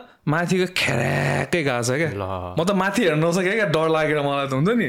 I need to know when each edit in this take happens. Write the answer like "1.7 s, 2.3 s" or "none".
none